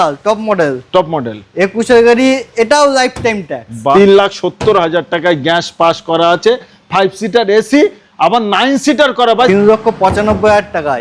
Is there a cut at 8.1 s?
no; 2 cuts; at 3.9 s, 9.5 s

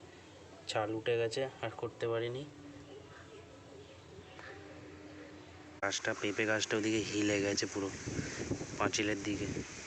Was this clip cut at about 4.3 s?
no; 1 cut; at 5.8 s

